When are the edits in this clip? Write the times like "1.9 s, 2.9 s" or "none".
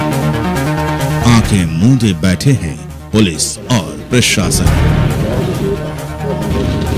1.1 s